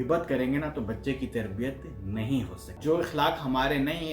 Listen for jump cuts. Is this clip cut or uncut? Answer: cut